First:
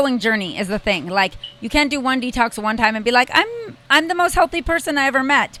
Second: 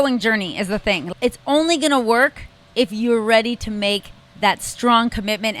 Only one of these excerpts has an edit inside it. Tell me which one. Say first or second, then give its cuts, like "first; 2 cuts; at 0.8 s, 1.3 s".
second; 1 cut; at 1.0 s